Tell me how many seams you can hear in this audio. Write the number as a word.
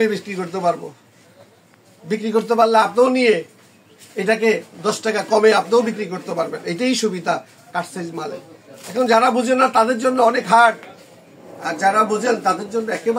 zero